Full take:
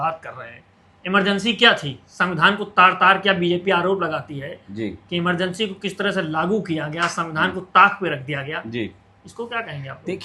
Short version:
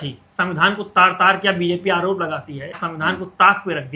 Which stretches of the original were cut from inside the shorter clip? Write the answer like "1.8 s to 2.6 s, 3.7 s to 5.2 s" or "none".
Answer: 4.6 s to 7.2 s